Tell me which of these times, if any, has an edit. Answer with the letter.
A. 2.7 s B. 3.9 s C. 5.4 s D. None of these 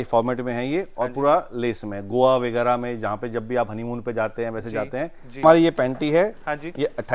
C